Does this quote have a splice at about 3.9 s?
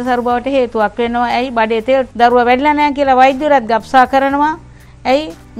no; 1 cut; at 2.1 s

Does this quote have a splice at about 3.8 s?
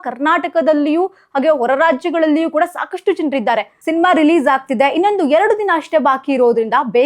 yes; 1 cut; at 3.8 s

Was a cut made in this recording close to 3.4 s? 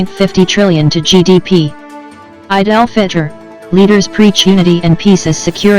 no; 1 cut; at 1.8 s

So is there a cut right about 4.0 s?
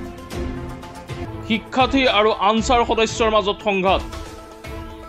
yes; 2 cuts; at 1.5 s, 4.0 s

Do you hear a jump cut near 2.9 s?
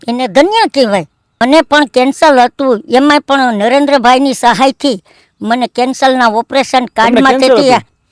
no; 1 cut; at 1.4 s

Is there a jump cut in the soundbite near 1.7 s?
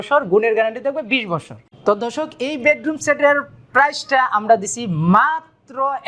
no; 0 cuts

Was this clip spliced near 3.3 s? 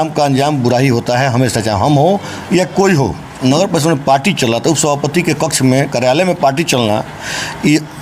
yes; 1 cut; at 3.3 s

